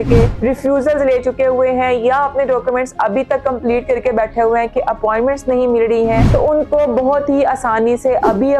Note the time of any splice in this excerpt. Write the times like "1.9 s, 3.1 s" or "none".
6.2 s